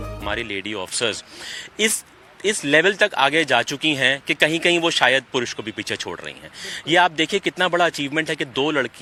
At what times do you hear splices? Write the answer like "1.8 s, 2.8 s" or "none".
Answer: none